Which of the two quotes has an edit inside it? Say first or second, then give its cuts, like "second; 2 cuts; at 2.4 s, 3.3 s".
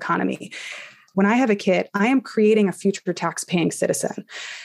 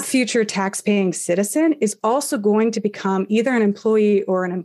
first; 1 cut; at 1.0 s